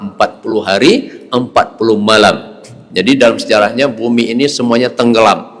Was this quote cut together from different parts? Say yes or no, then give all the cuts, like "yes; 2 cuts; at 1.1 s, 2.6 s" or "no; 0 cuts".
no; 0 cuts